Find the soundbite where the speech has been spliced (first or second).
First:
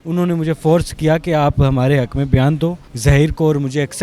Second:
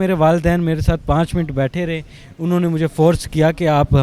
first